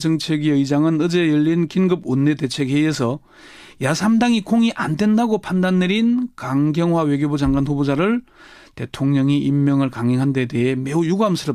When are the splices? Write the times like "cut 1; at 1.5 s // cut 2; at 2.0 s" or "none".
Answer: none

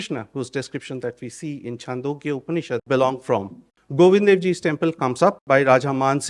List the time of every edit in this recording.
cut 1; at 2.8 s // cut 2; at 3.6 s // cut 3; at 5.4 s

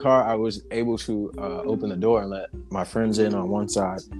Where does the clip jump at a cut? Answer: none

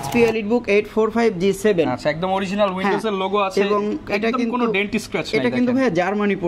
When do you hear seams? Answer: none

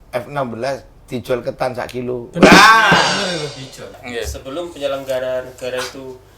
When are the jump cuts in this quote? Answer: cut 1; at 4.0 s

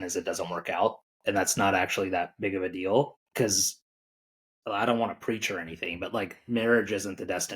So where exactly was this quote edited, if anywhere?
cut 1; at 1.1 s // cut 2; at 3.2 s

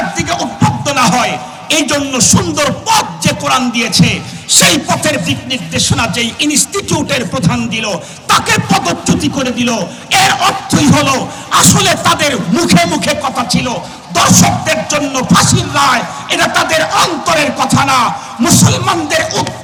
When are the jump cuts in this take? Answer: none

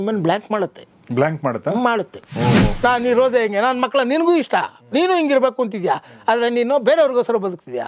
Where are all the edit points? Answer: cut 1; at 2.7 s

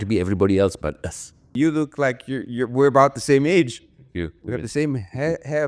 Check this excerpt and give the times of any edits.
cut 1; at 1.5 s

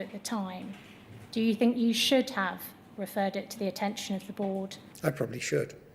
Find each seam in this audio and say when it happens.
cut 1; at 4.8 s

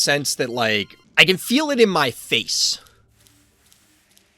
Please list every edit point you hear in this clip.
cut 1; at 1.0 s

